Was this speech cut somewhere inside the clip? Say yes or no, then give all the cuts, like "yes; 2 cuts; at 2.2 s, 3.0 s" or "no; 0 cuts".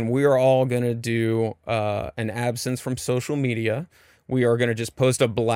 no; 0 cuts